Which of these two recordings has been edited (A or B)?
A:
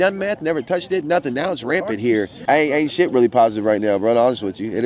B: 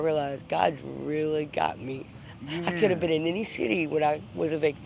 A